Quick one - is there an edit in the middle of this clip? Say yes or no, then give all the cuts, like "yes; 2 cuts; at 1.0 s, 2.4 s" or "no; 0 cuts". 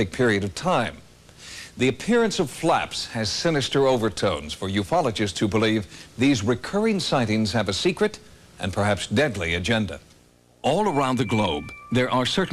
no; 0 cuts